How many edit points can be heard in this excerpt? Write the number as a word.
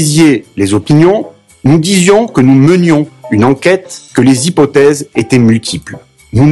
zero